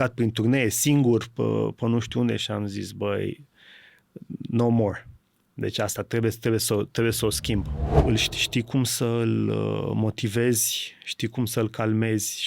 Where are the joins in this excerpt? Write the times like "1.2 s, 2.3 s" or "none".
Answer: 7.8 s